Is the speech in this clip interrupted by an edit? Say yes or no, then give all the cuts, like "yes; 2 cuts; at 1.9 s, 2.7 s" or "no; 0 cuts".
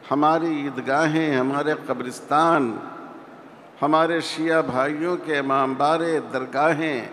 no; 0 cuts